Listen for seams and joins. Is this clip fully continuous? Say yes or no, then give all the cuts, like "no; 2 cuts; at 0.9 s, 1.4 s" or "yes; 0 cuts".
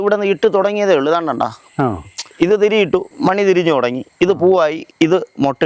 yes; 0 cuts